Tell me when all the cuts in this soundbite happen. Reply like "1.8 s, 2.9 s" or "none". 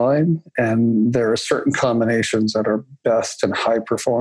none